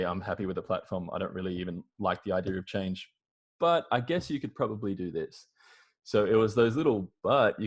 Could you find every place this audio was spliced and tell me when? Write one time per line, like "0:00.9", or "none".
none